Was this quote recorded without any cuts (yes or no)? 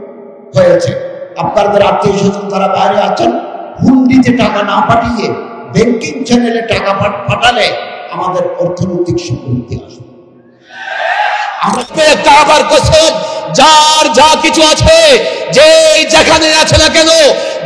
no